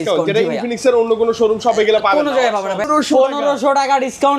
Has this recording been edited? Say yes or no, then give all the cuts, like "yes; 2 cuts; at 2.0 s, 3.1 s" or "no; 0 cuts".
yes; 1 cut; at 2.8 s